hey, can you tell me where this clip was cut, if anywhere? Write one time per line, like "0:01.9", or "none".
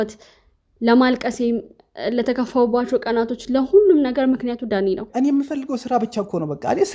0:05.1